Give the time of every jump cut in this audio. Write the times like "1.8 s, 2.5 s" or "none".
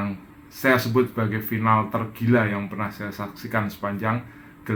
none